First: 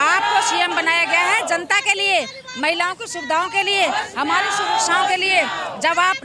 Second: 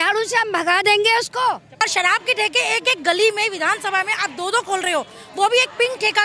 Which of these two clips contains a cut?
second; 1 cut; at 1.7 s

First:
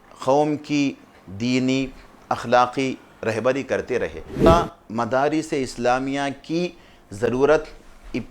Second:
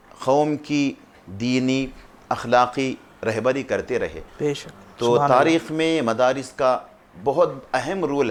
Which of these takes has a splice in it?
first; 1 cut; at 4.5 s

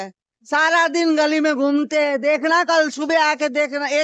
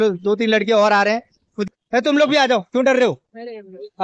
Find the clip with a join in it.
second; 1 cut; at 1.7 s

